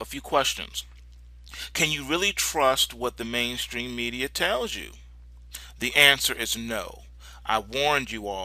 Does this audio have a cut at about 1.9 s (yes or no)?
yes